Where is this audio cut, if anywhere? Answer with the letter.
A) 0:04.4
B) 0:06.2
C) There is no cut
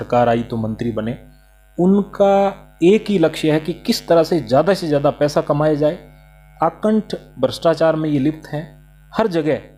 C